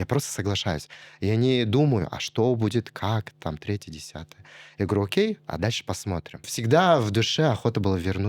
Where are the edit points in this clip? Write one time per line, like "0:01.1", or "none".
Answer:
0:06.6